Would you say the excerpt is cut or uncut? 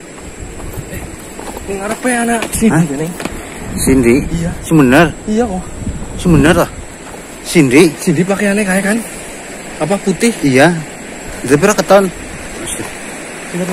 uncut